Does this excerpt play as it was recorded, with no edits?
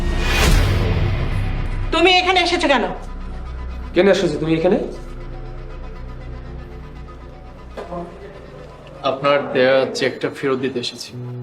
no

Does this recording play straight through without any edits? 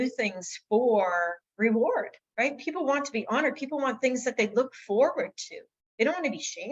no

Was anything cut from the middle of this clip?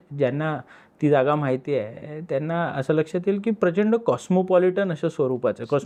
no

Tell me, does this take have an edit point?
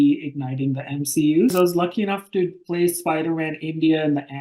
yes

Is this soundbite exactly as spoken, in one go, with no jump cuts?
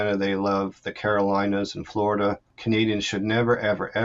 no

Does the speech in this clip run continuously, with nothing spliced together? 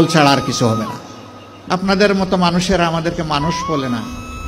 no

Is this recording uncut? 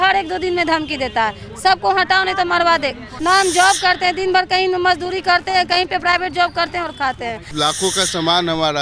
no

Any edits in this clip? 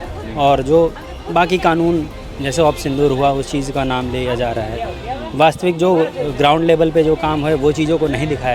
no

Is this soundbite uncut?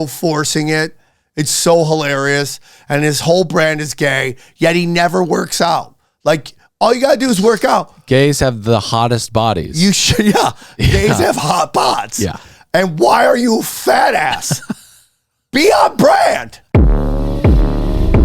no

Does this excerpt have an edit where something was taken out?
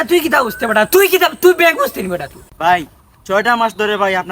yes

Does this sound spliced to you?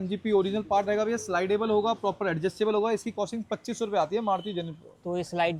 no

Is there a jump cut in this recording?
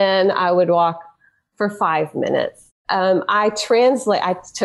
no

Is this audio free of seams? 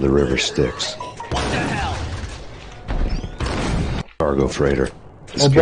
yes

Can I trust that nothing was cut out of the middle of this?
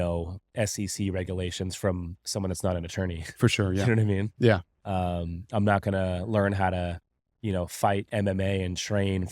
yes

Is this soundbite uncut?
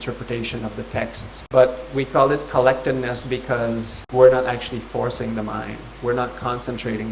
no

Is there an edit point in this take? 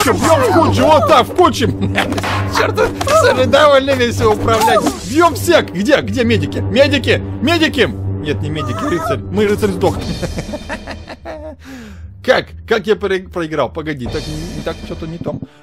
no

